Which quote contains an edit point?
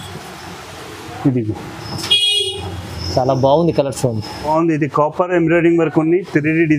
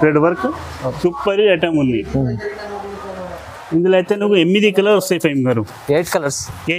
first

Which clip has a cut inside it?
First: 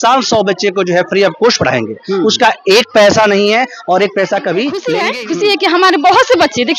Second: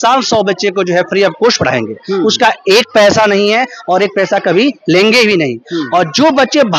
first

